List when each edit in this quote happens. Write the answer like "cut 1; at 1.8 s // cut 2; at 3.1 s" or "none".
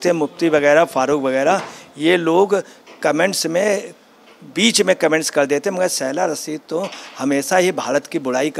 none